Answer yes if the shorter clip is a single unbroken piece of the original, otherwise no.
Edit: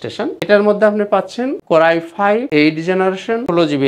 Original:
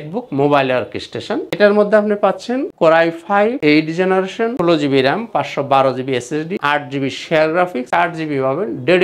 yes